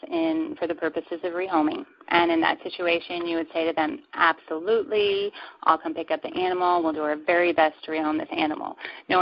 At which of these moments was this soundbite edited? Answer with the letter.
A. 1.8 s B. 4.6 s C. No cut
C